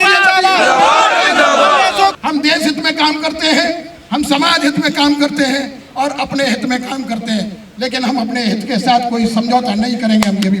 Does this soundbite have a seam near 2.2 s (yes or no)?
yes